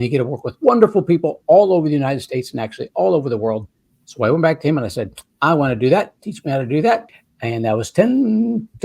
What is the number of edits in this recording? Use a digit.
1